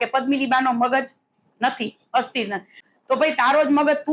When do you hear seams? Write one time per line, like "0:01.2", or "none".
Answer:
0:02.8